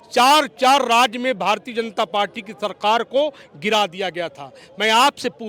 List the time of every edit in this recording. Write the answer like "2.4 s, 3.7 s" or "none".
none